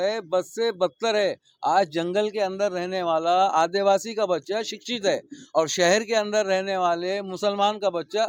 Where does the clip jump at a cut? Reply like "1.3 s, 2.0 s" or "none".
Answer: none